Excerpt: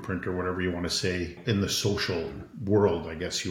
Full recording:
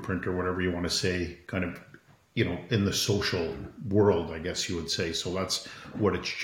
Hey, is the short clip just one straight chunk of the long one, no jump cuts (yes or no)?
no